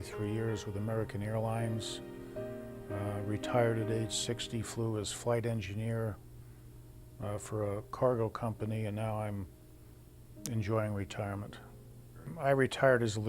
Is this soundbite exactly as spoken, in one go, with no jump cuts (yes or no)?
no